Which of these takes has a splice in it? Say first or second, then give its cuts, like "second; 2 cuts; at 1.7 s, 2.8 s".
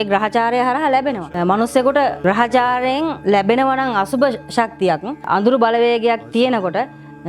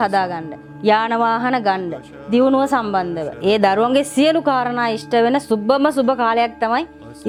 first; 1 cut; at 5.2 s